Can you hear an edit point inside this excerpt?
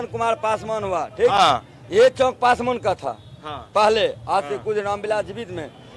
no; 0 cuts

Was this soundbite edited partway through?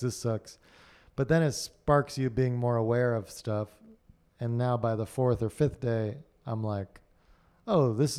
no; 0 cuts

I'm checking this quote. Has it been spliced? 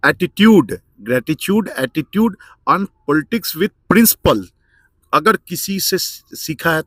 no; 0 cuts

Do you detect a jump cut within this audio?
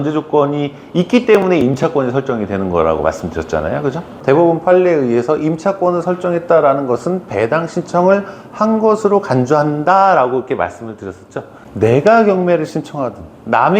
yes; 1 cut; at 4.1 s

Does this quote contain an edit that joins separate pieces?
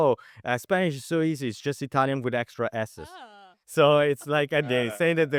no; 0 cuts

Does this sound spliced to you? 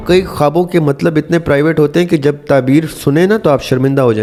no; 0 cuts

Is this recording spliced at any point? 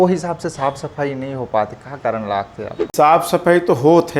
yes; 1 cut; at 2.9 s

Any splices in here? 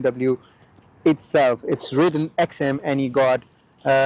no; 0 cuts

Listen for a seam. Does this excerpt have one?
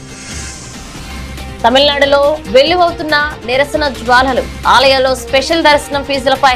yes; 1 cut; at 1.3 s

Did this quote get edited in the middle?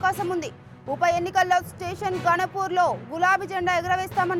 no; 0 cuts

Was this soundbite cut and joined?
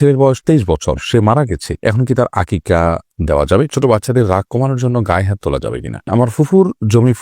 yes; 2 cuts; at 3.7 s, 6.1 s

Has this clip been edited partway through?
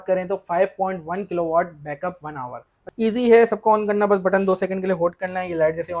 yes; 1 cut; at 2.8 s

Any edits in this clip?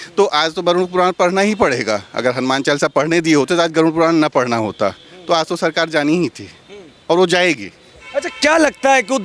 no; 0 cuts

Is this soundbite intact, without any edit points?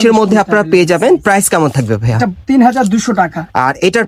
yes; 0 cuts

